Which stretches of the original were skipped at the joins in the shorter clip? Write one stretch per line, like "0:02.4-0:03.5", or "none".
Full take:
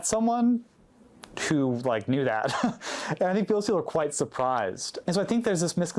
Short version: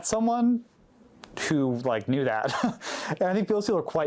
none